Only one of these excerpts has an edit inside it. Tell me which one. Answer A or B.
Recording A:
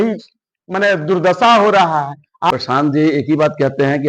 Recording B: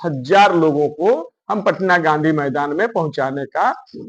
A